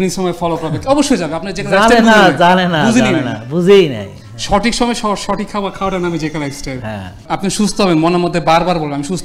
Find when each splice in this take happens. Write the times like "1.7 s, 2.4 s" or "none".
7.2 s